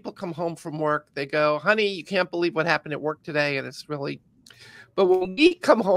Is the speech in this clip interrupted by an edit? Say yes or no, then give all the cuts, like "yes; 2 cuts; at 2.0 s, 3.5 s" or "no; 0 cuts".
no; 0 cuts